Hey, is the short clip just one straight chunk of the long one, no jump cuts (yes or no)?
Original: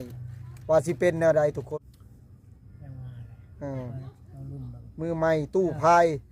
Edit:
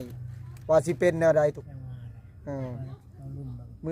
no